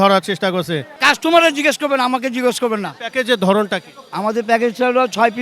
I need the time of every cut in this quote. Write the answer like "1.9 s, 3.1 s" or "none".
1.0 s